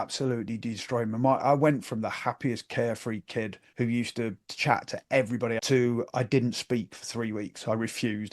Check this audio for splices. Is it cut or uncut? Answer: cut